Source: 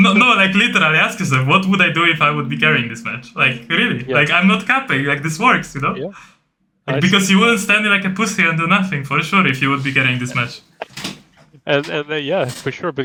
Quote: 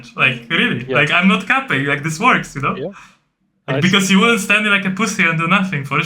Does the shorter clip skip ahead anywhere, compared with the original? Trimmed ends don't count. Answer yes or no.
no